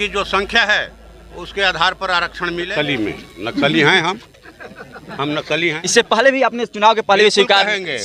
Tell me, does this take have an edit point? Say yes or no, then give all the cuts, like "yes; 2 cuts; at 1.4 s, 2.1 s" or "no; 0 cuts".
yes; 2 cuts; at 2.7 s, 5.8 s